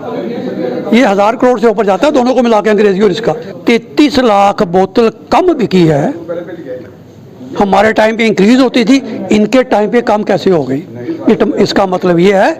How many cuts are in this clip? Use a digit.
1